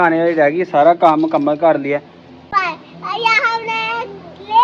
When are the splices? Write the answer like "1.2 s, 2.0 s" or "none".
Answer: 2.4 s